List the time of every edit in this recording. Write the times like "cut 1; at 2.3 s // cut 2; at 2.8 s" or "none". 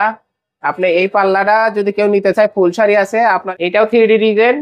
cut 1; at 3.5 s